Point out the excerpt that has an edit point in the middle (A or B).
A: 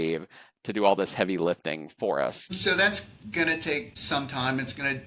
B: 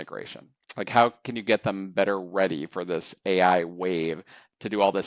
A